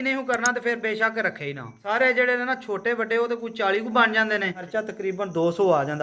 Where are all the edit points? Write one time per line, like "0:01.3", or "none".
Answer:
0:01.7
0:04.6

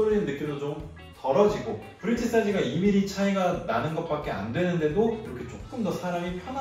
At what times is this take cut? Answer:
0:01.9

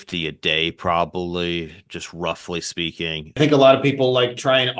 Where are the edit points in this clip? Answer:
0:03.4

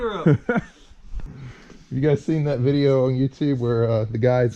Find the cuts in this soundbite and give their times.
0:01.2

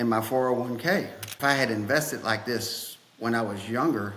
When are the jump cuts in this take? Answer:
0:01.2

